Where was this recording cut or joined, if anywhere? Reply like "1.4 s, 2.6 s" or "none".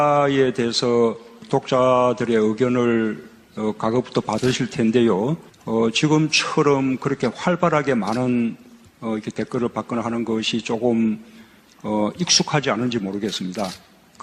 8.4 s

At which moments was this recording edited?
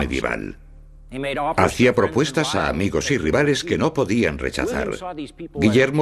3.3 s

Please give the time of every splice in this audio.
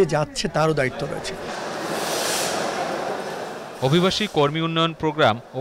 none

